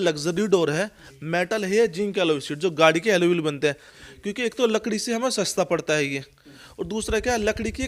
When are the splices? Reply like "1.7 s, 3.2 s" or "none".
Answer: 4.0 s